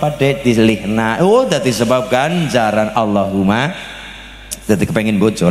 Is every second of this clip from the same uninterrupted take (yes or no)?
yes